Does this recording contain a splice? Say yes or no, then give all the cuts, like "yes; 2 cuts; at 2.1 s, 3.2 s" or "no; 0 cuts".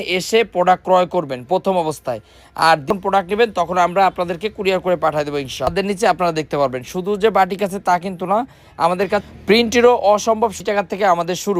yes; 3 cuts; at 2.9 s, 5.7 s, 10.6 s